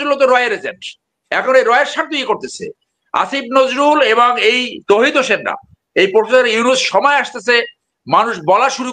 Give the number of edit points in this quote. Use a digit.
0